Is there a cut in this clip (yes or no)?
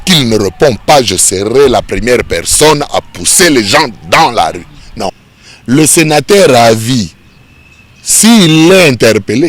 yes